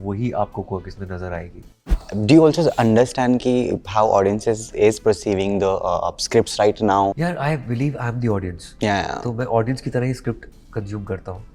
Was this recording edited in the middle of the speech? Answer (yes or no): yes